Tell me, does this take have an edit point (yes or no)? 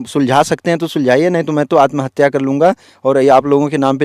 no